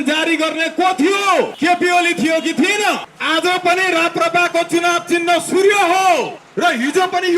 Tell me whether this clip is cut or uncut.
cut